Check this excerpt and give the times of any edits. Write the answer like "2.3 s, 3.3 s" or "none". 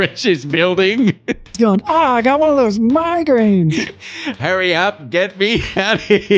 1.6 s, 3.7 s